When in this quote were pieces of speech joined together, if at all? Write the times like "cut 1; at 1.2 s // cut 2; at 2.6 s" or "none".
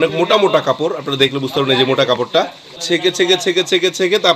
cut 1; at 2.8 s

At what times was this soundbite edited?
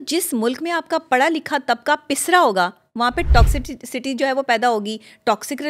none

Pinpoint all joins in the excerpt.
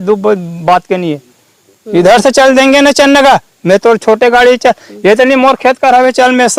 none

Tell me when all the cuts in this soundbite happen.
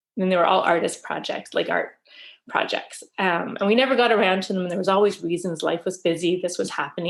none

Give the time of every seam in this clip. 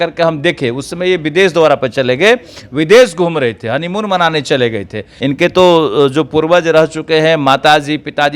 cut 1; at 5.1 s

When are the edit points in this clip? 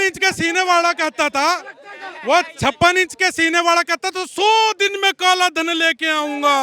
none

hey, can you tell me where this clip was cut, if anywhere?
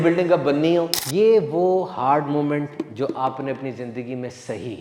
cut 1; at 1.0 s

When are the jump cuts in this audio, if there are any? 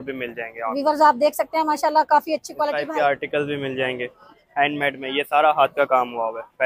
cut 1; at 2.7 s

